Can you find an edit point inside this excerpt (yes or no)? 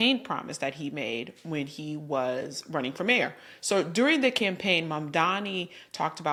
no